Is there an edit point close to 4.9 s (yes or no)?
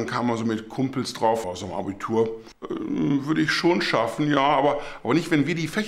no